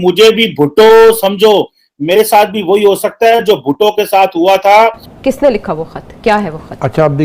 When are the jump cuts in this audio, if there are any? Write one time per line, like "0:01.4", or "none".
0:05.1